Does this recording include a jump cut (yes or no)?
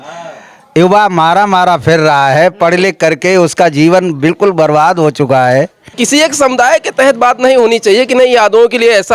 yes